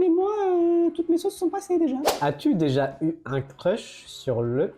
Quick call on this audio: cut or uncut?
cut